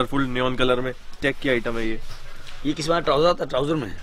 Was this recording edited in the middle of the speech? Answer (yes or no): yes